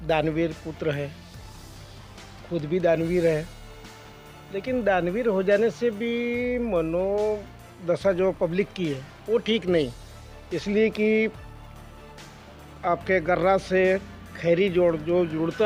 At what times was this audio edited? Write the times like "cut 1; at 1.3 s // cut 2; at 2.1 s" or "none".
none